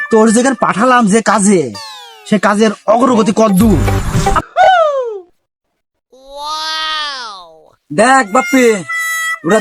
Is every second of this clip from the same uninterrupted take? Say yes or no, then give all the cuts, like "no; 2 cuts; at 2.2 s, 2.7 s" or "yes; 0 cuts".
no; 1 cut; at 4.4 s